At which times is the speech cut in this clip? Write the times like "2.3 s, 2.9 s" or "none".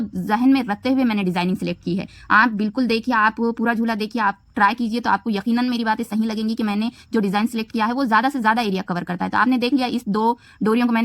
none